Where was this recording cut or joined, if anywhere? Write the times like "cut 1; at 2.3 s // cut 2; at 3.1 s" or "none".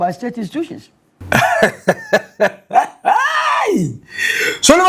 cut 1; at 1.1 s